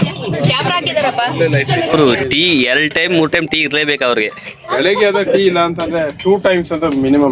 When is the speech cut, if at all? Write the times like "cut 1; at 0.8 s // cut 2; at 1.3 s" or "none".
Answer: cut 1; at 1.9 s